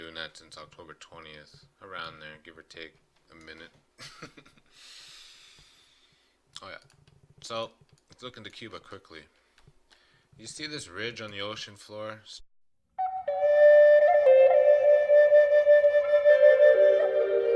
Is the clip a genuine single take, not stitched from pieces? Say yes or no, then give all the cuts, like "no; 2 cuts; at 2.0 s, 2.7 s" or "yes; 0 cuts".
yes; 0 cuts